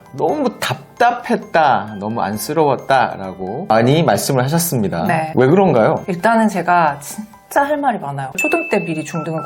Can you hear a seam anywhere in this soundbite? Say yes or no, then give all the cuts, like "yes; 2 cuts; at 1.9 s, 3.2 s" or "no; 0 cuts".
yes; 2 cuts; at 6.1 s, 8.3 s